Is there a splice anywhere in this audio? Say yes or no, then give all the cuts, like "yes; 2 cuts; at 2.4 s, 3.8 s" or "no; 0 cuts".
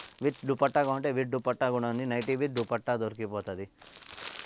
no; 0 cuts